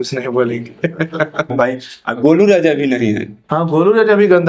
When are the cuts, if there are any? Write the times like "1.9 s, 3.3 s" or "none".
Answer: 1.5 s